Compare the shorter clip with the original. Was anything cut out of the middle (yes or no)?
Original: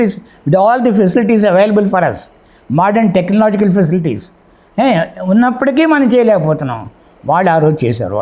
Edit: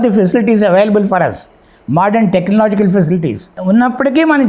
yes